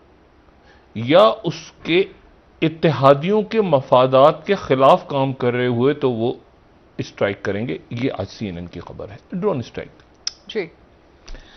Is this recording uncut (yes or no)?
yes